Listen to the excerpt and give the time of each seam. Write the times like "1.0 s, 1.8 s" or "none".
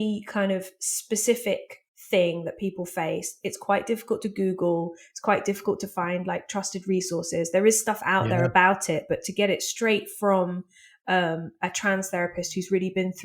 none